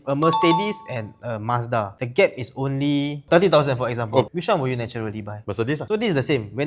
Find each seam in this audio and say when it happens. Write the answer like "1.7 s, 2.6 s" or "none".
4.3 s, 5.8 s